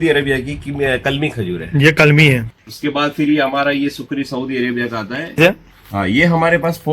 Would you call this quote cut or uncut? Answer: cut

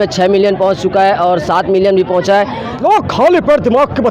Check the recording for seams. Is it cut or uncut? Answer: cut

